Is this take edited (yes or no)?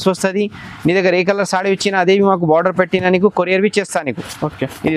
no